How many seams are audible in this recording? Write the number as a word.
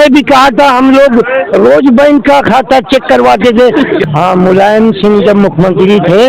one